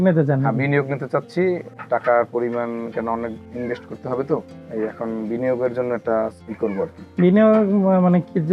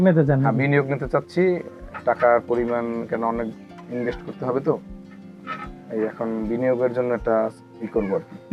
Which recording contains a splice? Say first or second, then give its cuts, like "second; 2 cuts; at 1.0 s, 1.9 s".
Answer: first; 4 cuts; at 1.7 s, 3.4 s, 4.6 s, 6.4 s